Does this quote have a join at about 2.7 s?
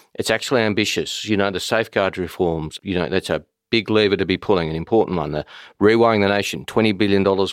yes; 1 cut; at 2.7 s

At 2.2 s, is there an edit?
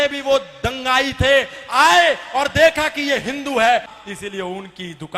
no; 1 cut; at 3.9 s

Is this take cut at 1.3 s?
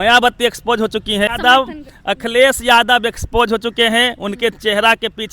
yes; 1 cut; at 1.3 s

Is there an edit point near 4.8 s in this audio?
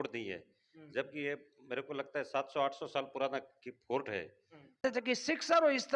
yes; 1 cut; at 4.8 s

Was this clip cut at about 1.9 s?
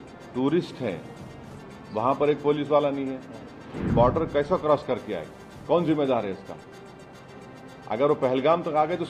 no; 1 cut; at 3.8 s

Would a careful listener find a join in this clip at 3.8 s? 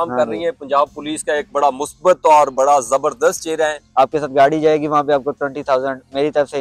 yes; 1 cut; at 3.8 s

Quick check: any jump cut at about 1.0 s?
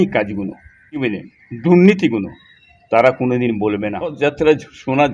yes; 2 cuts; at 1.0 s, 4.2 s

